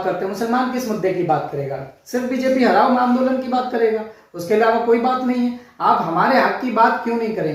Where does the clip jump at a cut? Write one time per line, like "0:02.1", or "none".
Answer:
none